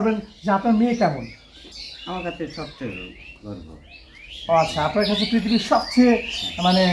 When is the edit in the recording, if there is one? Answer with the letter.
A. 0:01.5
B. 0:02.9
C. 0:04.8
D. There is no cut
A